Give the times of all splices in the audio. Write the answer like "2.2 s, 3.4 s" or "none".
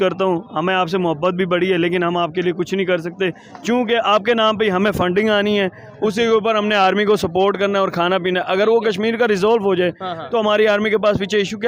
none